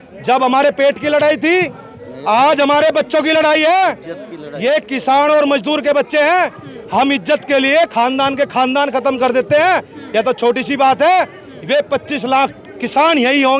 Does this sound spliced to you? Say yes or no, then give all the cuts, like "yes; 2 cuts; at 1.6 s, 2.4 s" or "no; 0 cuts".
no; 0 cuts